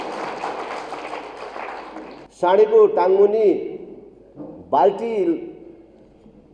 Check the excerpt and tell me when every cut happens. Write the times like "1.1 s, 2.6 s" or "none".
2.2 s